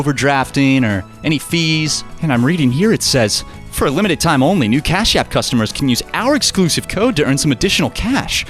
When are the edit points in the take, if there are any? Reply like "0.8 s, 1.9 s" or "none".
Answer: 2.2 s

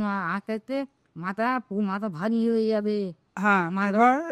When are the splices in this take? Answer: none

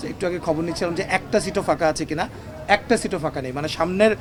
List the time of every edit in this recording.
none

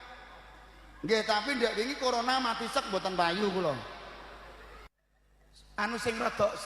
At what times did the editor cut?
4.8 s

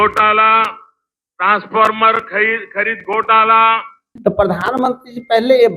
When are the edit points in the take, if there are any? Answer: 4.1 s

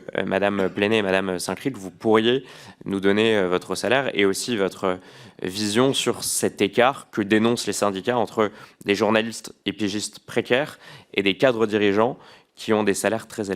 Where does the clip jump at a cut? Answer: none

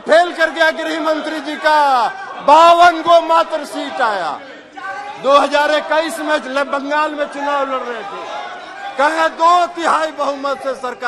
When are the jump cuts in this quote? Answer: none

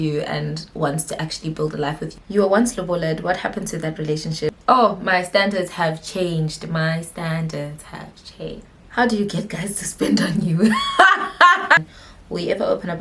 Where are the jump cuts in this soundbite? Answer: 2.1 s, 4.5 s, 8.8 s, 11.8 s

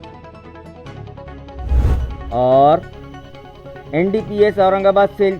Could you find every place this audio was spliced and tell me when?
none

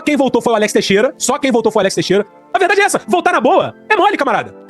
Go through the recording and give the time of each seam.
2.3 s

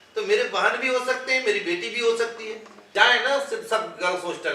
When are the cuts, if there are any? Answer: 2.7 s

